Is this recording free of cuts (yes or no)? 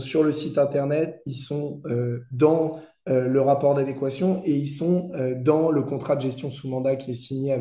yes